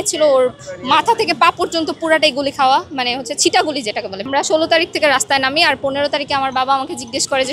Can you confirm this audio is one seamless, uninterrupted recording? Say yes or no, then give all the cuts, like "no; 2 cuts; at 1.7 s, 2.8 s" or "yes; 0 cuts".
no; 1 cut; at 4.3 s